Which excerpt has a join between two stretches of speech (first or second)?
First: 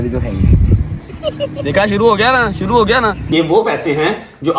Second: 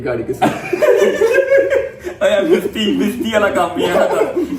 first